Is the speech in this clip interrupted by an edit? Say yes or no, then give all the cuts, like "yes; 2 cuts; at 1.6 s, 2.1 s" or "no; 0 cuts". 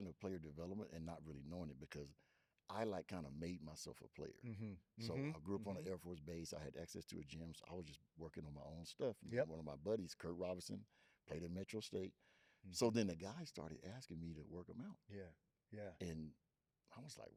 no; 0 cuts